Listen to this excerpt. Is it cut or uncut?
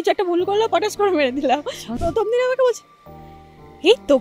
cut